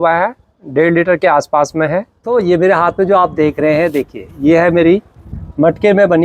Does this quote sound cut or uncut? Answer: cut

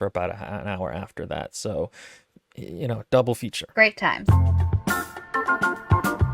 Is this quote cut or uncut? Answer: cut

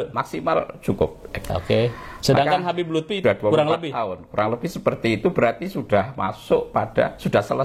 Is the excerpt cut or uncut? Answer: cut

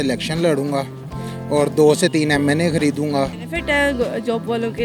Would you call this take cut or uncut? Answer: cut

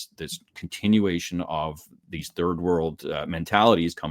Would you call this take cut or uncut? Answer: uncut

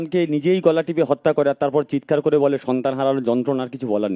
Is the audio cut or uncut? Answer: uncut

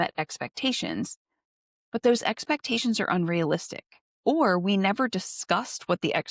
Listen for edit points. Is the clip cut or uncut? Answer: uncut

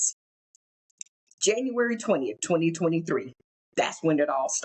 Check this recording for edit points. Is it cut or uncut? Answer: uncut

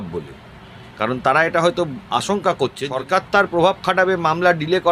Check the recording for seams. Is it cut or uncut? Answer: cut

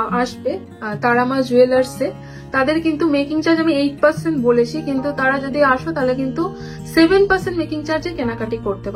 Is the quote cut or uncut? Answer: uncut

